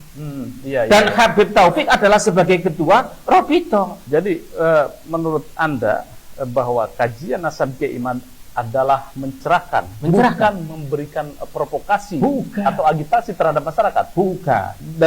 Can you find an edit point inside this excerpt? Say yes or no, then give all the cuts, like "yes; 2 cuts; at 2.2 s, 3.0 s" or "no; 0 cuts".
yes; 1 cut; at 4.0 s